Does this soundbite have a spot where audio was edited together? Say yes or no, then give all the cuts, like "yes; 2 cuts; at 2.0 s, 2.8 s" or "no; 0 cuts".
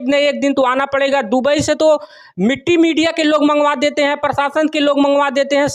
no; 0 cuts